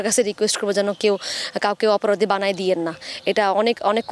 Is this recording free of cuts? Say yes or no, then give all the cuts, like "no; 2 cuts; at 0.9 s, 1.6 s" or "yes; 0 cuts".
yes; 0 cuts